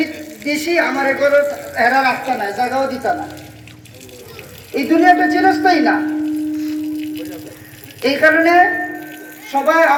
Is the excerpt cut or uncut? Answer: uncut